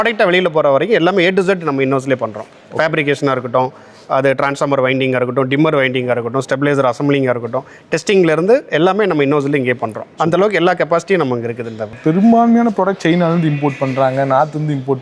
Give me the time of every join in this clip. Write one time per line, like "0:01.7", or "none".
none